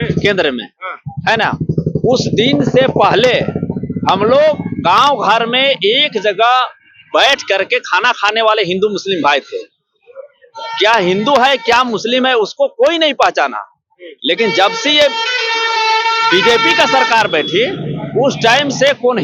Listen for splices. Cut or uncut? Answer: uncut